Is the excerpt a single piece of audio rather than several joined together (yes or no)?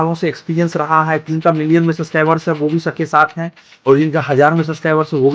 no